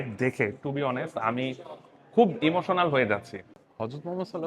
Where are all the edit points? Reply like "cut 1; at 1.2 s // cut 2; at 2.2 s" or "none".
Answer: cut 1; at 3.3 s